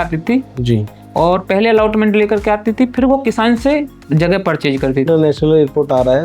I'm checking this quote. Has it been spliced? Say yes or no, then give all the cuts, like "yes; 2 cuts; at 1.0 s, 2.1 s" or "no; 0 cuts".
yes; 1 cut; at 5.1 s